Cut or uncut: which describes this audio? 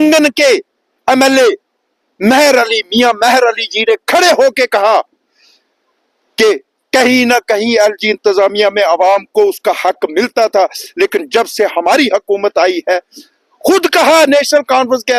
uncut